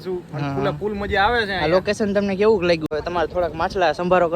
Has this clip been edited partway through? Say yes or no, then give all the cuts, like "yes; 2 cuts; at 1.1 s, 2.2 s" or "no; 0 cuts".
yes; 1 cut; at 2.9 s